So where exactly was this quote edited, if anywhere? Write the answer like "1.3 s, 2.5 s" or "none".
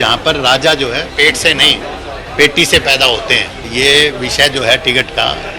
3.7 s